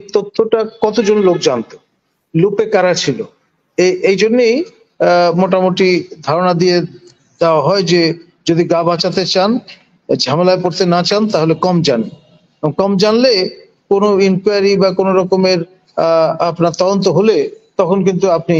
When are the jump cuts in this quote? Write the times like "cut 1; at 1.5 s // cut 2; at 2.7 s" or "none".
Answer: none